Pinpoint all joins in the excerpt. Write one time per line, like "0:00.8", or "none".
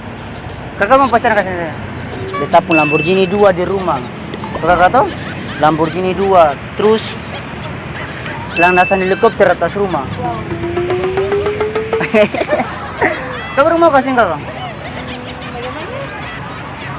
0:02.3